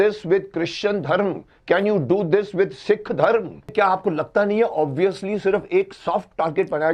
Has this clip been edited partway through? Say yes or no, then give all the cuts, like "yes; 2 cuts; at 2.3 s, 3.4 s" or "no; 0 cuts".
yes; 1 cut; at 3.7 s